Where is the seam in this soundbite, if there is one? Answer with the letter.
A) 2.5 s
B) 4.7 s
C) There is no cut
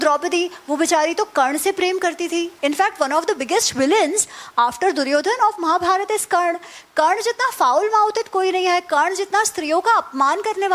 A